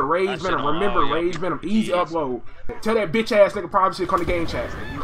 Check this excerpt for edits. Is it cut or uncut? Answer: cut